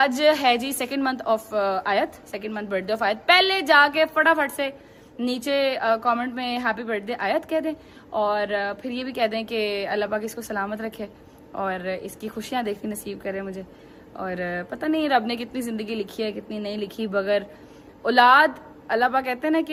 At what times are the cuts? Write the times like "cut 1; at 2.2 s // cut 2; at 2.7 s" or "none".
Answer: none

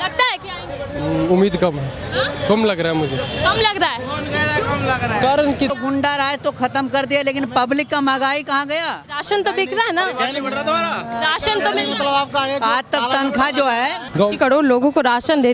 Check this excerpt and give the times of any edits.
cut 1; at 5.7 s // cut 2; at 14.0 s

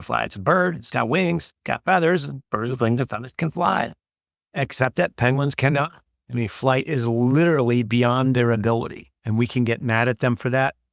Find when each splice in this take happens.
none

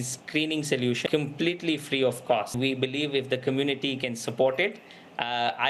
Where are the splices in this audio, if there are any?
cut 1; at 1.0 s // cut 2; at 2.5 s

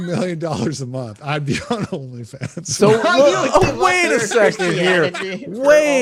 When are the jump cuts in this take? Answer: none

